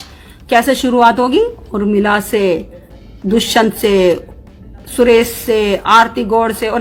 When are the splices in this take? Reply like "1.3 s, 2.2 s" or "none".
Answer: none